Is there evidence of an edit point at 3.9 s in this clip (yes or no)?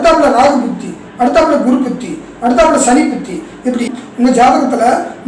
yes